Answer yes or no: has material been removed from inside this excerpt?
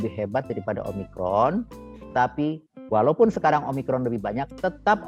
no